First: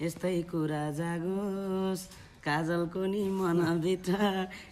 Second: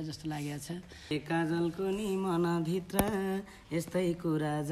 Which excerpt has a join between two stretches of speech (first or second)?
second